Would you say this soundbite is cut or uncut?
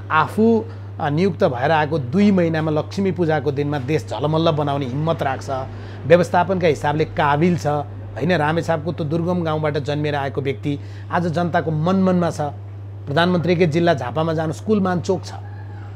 uncut